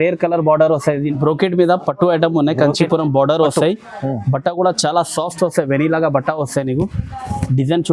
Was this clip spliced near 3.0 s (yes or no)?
no